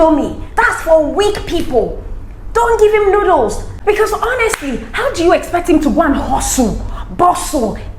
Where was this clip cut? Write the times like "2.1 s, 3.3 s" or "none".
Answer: none